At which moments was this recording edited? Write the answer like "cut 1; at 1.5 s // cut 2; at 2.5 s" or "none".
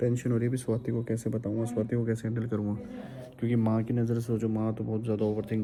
none